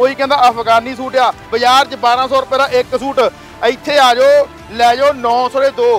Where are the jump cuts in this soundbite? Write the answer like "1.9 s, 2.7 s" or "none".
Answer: 1.4 s